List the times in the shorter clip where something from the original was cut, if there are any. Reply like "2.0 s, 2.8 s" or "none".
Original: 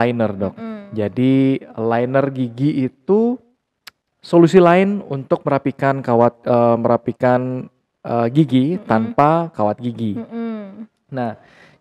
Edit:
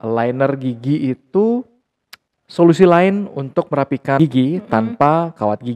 4.2 s